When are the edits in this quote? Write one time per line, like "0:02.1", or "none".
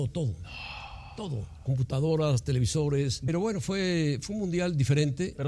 0:03.2